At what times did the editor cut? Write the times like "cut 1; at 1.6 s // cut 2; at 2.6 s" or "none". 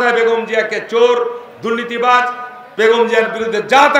none